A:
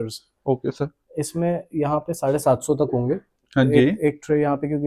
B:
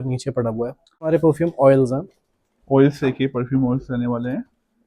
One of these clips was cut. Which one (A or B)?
B